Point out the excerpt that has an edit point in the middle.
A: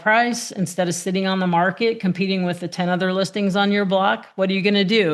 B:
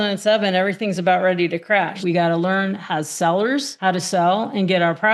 B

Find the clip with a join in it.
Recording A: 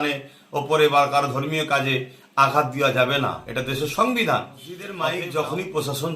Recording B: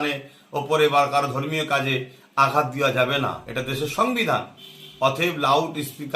A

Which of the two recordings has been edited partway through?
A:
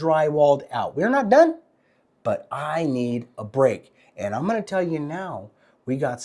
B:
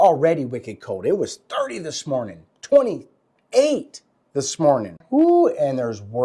B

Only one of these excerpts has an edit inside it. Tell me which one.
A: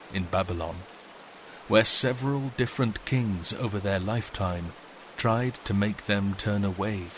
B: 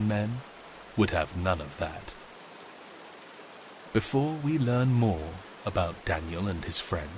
B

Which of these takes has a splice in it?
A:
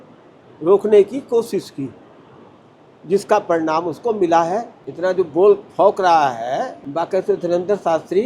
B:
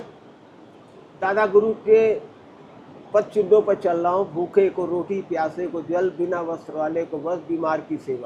A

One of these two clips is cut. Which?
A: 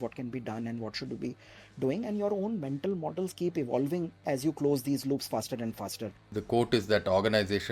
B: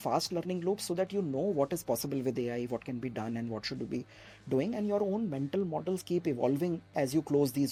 A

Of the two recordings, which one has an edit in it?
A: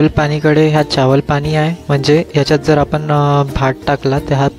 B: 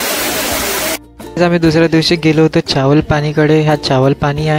B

